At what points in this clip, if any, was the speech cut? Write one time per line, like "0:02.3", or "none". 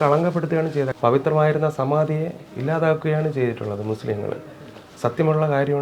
0:00.9